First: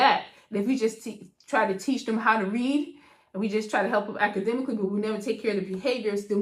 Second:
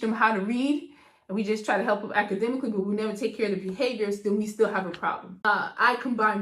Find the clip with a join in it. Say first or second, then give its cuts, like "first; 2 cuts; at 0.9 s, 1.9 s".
second; 1 cut; at 5.3 s